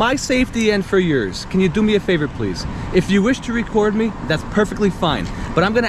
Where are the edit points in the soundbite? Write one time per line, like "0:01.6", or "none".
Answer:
none